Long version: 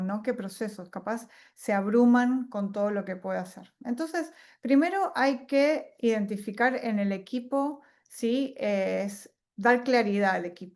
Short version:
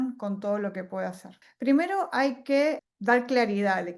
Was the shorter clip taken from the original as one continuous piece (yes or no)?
no